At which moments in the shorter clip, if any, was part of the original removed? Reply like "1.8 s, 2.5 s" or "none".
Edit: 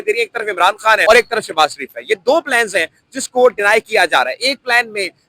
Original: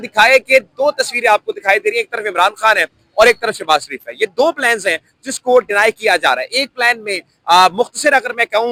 1.0 s